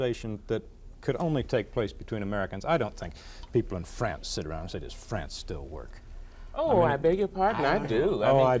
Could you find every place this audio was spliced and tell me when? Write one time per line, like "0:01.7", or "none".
none